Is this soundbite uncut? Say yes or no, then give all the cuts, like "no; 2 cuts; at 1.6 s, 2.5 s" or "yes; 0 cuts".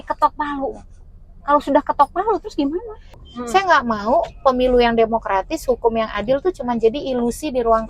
no; 1 cut; at 3.3 s